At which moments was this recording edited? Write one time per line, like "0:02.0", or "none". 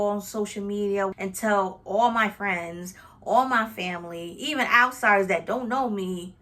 0:01.1